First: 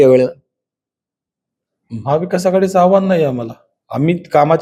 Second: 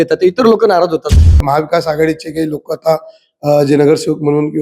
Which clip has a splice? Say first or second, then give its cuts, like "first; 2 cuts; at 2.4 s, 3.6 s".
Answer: second; 1 cut; at 1.3 s